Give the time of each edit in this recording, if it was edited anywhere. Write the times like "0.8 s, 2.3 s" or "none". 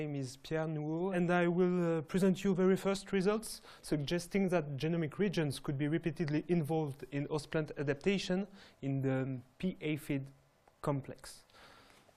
none